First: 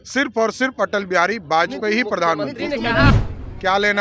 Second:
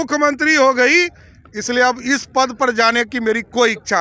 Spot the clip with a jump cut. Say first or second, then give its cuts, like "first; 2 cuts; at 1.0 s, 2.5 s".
first; 1 cut; at 3.1 s